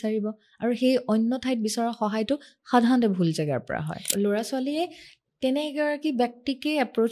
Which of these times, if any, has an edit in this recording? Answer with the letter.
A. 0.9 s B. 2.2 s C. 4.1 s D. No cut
C